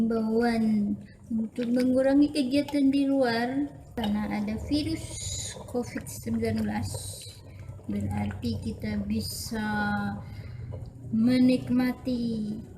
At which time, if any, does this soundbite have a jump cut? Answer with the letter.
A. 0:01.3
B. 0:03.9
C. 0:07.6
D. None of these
B